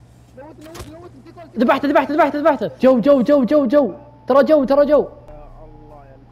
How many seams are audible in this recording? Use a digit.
2